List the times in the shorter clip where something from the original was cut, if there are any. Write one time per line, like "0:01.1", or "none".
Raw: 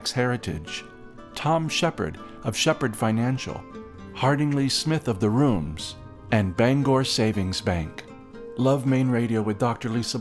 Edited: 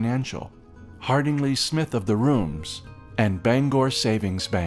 none